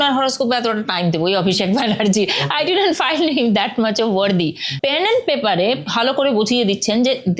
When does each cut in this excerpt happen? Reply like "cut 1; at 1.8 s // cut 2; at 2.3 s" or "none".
cut 1; at 4.7 s // cut 2; at 5.8 s